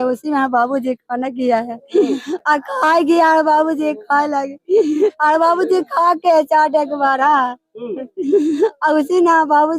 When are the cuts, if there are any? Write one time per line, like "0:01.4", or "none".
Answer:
none